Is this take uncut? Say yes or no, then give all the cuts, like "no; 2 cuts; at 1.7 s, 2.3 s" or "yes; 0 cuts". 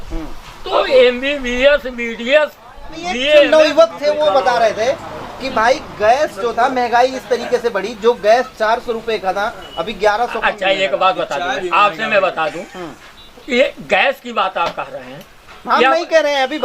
no; 1 cut; at 3.5 s